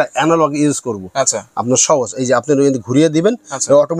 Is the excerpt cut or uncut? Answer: uncut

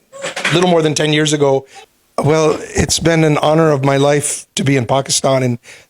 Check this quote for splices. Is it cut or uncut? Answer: cut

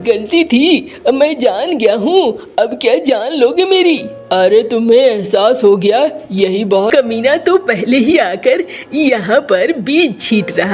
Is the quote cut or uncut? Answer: cut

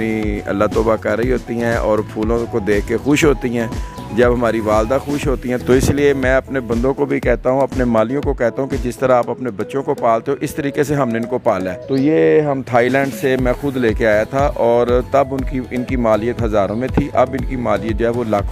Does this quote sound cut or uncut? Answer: cut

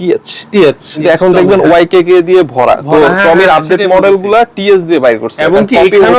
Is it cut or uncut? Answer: cut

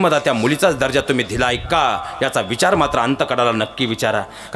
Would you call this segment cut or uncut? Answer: uncut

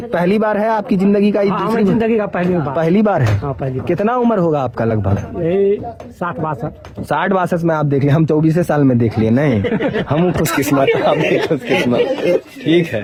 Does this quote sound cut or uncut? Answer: uncut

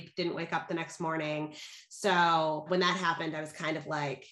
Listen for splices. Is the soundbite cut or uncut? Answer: cut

